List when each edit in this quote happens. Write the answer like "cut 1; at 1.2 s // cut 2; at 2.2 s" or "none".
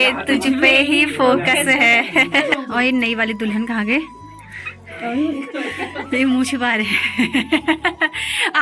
cut 1; at 2.5 s